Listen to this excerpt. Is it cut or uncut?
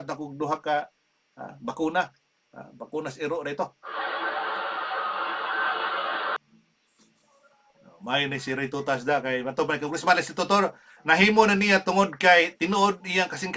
cut